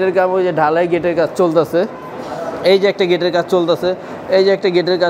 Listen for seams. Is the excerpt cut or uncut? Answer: uncut